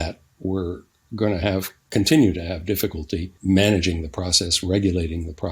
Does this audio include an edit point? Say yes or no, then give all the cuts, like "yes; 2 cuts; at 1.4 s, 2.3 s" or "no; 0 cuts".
yes; 1 cut; at 3.3 s